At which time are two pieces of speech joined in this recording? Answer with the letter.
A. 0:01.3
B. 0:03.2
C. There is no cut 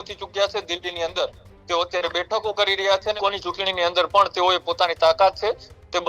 B